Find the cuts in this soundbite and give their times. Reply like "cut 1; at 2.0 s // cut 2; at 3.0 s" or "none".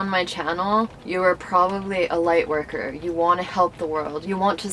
cut 1; at 1.0 s